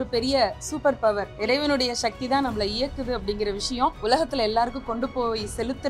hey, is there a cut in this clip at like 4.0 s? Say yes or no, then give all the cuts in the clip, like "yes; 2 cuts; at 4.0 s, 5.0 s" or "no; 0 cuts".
yes; 2 cuts; at 1.3 s, 4.0 s